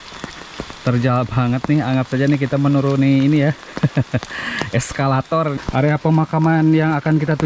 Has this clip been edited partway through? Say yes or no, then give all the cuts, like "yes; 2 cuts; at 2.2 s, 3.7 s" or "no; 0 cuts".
yes; 1 cut; at 5.5 s